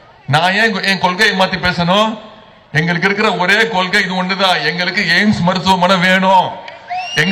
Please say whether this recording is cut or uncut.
uncut